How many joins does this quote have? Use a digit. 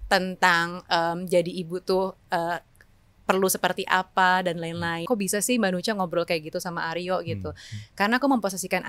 1